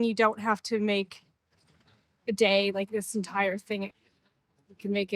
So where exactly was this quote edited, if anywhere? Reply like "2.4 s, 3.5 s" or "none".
3.9 s